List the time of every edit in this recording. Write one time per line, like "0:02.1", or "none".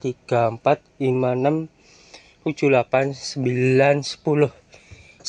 none